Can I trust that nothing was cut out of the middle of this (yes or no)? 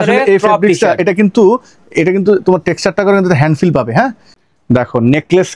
no